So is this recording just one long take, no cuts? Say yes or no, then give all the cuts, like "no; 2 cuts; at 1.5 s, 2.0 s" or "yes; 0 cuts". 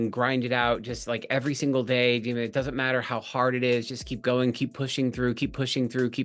yes; 0 cuts